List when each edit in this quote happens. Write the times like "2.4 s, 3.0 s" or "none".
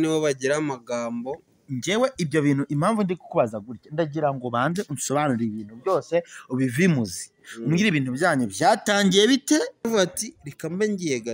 9.9 s